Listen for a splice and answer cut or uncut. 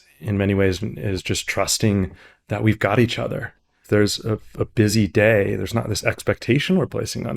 cut